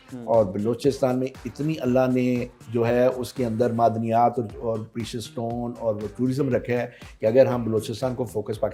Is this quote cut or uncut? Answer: uncut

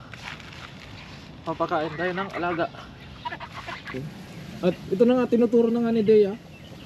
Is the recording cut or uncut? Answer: cut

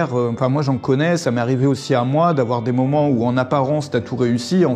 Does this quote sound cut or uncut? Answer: uncut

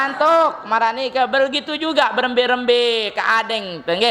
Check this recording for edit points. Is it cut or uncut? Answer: uncut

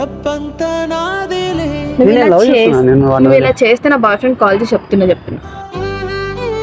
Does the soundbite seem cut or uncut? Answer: uncut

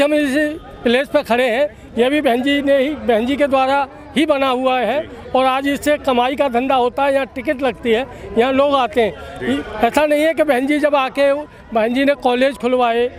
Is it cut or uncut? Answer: uncut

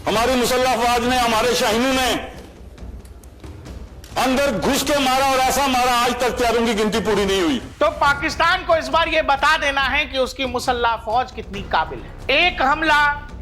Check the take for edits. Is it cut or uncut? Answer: cut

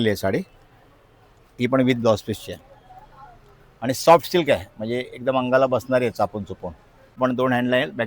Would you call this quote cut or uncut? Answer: cut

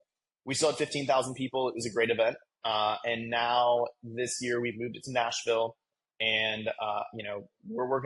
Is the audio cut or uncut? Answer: uncut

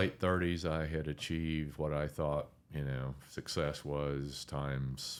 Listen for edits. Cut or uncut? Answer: uncut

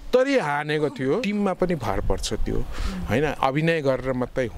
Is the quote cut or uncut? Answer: cut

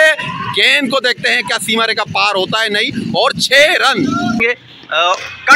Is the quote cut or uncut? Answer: cut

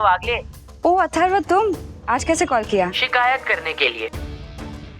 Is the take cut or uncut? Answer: cut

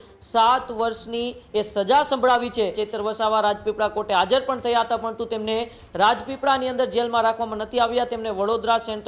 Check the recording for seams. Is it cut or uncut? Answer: cut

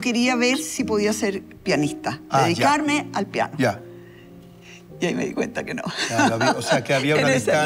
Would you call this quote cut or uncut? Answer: uncut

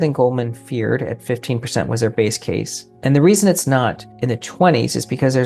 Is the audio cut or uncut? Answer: cut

